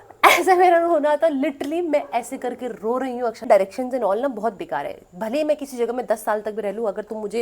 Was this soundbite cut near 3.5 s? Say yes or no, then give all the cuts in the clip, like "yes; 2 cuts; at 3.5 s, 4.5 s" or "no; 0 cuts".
yes; 1 cut; at 3.5 s